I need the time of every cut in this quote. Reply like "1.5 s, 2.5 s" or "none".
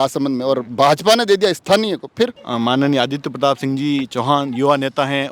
2.4 s